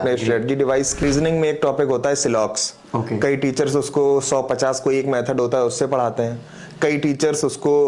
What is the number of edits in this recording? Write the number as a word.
one